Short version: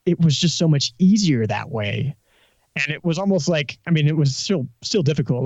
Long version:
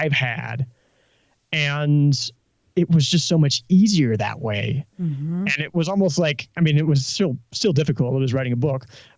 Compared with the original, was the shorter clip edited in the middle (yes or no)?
no